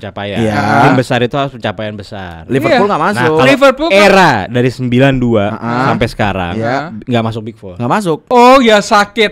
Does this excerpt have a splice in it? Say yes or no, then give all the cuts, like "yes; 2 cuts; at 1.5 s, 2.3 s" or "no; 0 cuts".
yes; 1 cut; at 8.3 s